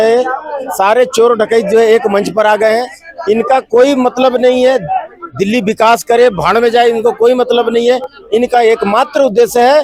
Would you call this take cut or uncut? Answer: uncut